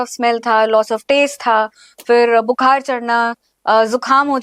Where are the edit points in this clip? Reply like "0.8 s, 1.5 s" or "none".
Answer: none